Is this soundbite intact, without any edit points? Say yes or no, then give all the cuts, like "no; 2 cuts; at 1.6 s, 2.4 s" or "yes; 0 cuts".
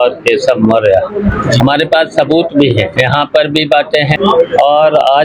no; 3 cuts; at 1.6 s, 2.9 s, 4.1 s